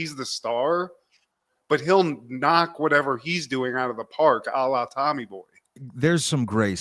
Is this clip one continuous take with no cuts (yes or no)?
yes